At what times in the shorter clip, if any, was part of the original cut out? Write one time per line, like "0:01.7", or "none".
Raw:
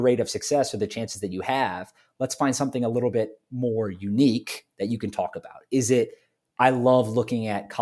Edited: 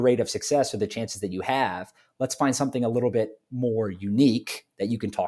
none